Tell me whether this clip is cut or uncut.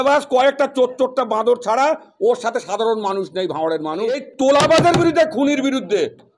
cut